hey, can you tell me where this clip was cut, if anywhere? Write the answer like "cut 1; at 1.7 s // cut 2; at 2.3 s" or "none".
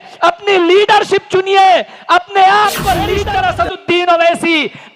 cut 1; at 3.2 s